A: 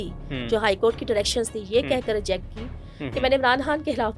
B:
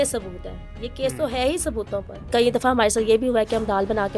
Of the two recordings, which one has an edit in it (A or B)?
B